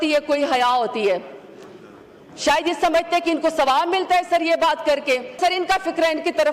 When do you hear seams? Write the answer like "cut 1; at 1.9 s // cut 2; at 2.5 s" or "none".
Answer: cut 1; at 5.4 s